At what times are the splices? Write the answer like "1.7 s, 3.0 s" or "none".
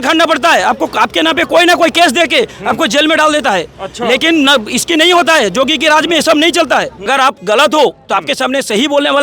7.1 s